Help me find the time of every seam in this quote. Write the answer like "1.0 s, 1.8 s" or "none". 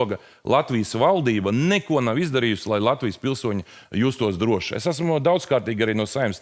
none